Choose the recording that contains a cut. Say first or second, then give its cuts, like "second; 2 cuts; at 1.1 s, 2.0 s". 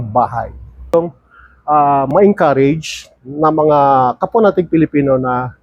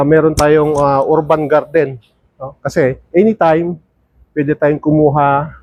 first; 1 cut; at 0.9 s